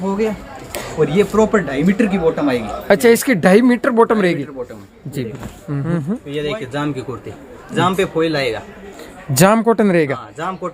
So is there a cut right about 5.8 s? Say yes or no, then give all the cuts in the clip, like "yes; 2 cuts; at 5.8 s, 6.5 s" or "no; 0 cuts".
yes; 1 cut; at 5.8 s